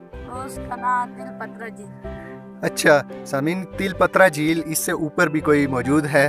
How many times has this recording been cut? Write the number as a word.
zero